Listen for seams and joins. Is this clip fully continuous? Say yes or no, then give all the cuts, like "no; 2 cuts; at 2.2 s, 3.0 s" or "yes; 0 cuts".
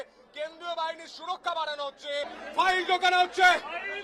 no; 1 cut; at 2.4 s